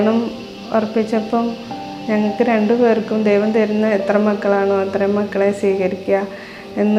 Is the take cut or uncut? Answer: uncut